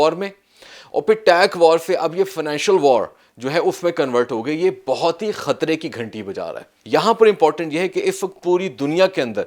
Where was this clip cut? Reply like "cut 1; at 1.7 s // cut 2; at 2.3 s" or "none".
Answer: cut 1; at 6.7 s